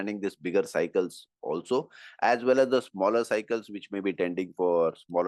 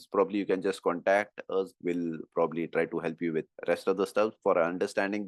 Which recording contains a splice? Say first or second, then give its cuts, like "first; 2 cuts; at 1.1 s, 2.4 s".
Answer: second; 2 cuts; at 1.7 s, 3.5 s